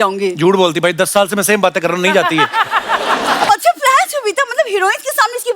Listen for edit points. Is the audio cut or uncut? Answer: cut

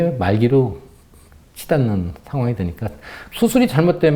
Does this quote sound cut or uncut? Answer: cut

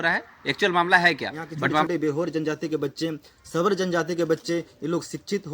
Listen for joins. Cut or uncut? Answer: cut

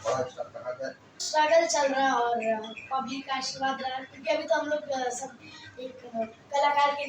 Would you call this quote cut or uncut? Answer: cut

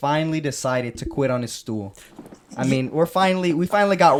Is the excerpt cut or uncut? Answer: uncut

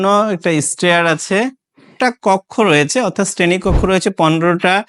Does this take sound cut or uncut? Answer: cut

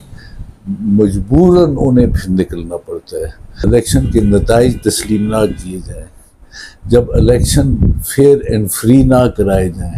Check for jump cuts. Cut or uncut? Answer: cut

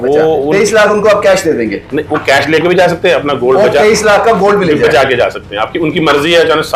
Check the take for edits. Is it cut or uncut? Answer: uncut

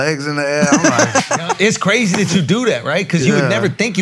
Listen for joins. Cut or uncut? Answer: uncut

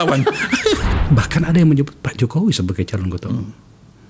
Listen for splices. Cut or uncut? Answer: cut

